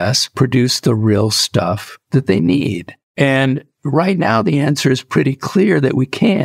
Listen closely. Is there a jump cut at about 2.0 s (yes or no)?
no